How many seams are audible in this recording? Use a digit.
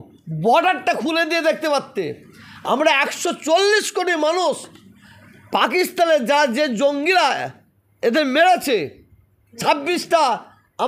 0